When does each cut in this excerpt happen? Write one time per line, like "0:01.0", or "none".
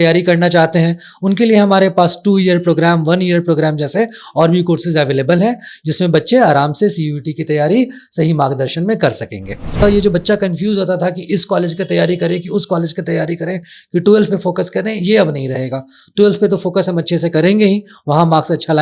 0:09.8